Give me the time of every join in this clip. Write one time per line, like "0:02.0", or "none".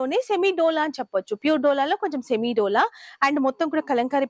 none